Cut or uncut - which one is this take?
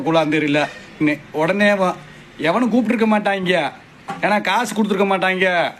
cut